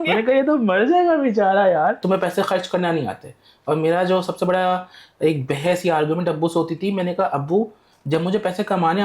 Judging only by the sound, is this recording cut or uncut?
cut